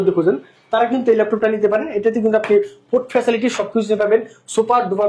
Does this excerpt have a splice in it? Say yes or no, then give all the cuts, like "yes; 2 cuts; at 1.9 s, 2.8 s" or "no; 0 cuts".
no; 0 cuts